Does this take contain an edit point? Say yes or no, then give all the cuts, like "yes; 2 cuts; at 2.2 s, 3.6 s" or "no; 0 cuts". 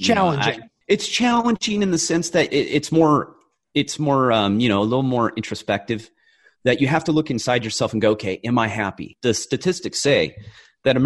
no; 0 cuts